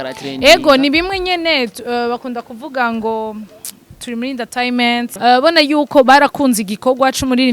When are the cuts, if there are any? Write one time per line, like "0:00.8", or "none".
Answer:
0:05.1

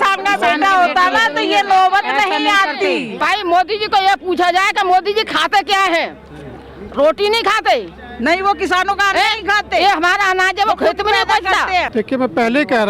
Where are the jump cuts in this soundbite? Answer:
0:03.2
0:11.9

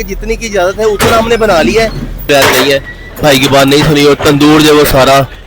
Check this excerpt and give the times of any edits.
0:02.3

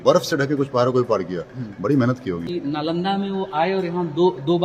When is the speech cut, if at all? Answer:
0:02.5

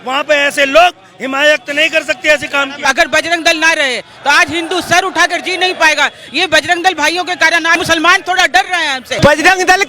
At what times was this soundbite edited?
0:02.8
0:07.8
0:09.2

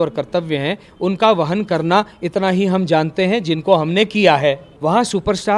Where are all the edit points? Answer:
0:04.7

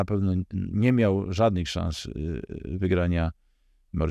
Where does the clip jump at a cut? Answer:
none

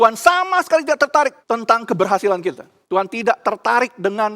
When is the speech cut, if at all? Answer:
0:01.4
0:02.7

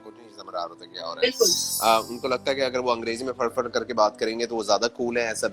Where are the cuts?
0:01.6

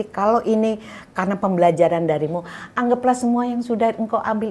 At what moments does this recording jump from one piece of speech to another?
none

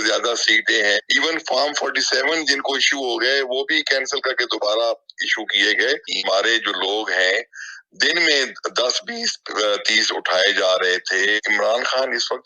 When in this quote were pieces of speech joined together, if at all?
0:01.0
0:06.1
0:11.4

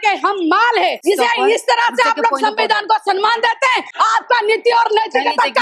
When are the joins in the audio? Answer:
0:01.0
0:03.9

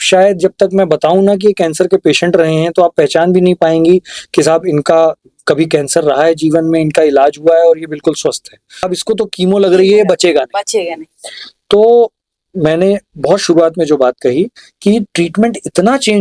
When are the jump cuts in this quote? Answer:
0:08.9

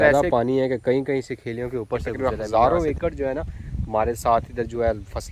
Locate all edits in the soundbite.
0:02.1

